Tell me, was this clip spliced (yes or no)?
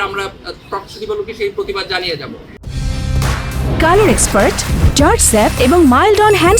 no